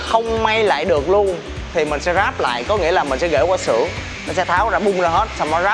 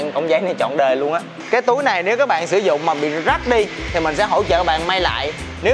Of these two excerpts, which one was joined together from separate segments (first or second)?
second